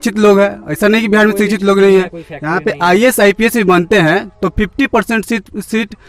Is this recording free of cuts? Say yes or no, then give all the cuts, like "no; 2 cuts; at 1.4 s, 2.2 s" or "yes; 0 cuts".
yes; 0 cuts